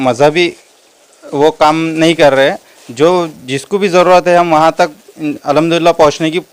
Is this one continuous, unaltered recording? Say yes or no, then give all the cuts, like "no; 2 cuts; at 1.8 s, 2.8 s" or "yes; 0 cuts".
yes; 0 cuts